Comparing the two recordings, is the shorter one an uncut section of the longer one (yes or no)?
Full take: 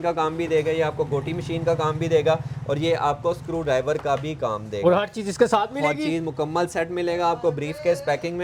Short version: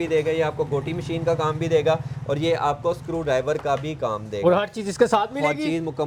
yes